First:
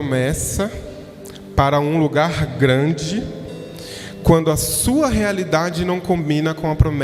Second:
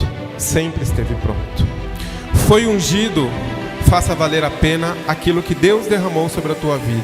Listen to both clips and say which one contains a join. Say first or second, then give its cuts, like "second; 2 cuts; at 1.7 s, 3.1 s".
second; 1 cut; at 1.9 s